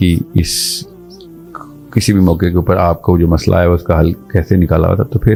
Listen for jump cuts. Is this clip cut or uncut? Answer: uncut